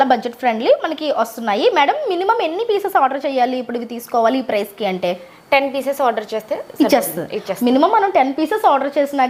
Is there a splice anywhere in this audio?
no; 0 cuts

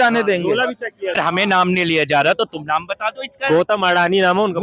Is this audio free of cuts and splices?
no; 1 cut; at 1.2 s

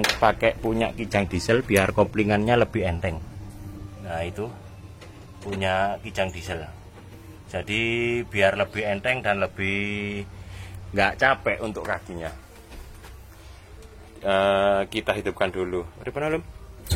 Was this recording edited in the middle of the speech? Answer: no; 0 cuts

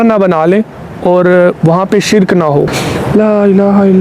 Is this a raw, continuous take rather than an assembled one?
no; 1 cut; at 2.8 s

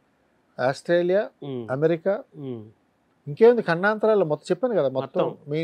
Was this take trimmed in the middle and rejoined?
no; 0 cuts

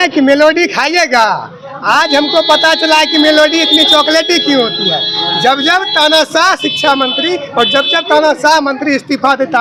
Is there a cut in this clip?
no; 0 cuts

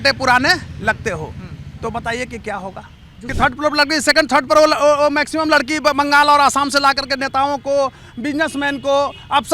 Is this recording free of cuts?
no; 1 cut; at 3.2 s

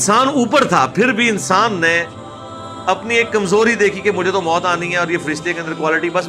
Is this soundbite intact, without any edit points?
yes; 0 cuts

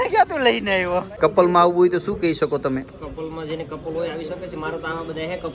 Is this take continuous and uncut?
no; 1 cut; at 1.1 s

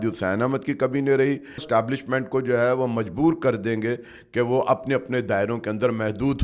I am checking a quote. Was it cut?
yes; 1 cut; at 1.6 s

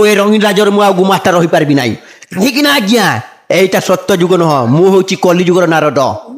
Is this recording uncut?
yes; 0 cuts

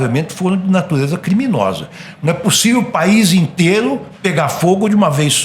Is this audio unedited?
yes; 0 cuts

